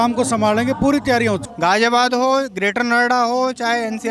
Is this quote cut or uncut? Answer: cut